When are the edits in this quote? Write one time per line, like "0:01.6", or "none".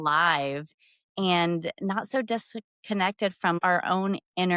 0:03.6